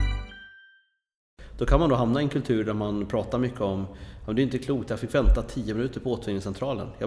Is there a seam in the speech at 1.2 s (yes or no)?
yes